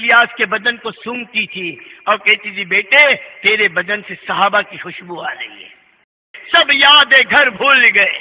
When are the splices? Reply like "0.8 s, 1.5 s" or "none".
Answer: 6.3 s